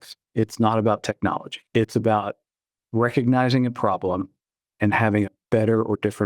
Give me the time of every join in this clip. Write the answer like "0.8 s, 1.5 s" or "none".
1.5 s